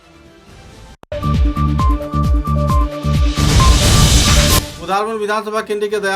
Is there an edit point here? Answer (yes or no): yes